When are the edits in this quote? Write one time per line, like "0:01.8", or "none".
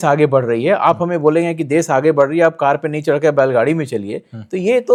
none